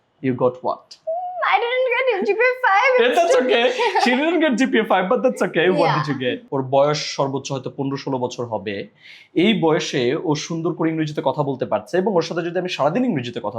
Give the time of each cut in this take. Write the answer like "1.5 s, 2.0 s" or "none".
6.4 s